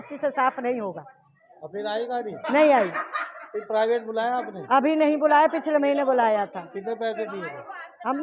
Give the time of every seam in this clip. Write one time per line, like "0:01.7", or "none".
none